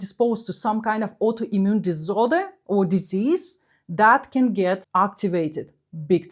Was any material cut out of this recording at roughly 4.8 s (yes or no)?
yes